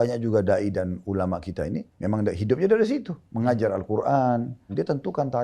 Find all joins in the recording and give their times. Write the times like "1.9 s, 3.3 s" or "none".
1.9 s, 4.7 s